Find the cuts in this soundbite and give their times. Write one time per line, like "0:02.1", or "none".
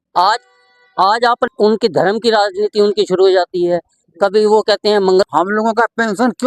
0:01.5
0:05.3

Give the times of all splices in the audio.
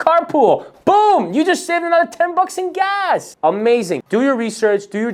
none

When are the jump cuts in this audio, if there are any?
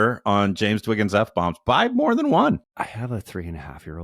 0:02.7

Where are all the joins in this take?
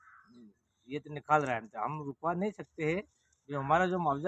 none

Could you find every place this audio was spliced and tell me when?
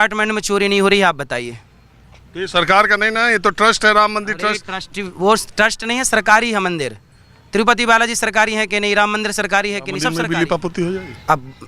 0:10.1

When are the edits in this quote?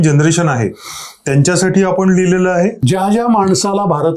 0:02.8

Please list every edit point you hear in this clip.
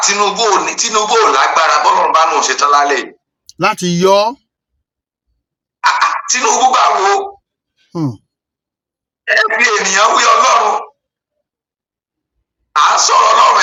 none

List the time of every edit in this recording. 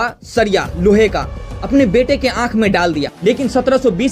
0:03.1

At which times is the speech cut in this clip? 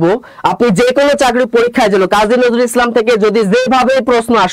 none

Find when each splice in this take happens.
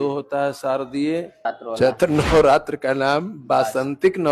0:01.5

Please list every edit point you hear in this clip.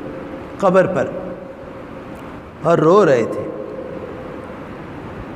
0:02.5

